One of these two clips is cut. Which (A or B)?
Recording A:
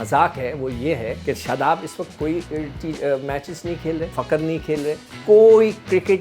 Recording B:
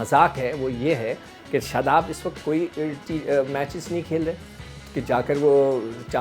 A